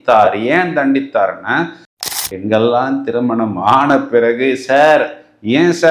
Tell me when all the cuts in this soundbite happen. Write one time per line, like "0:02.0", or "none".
0:01.9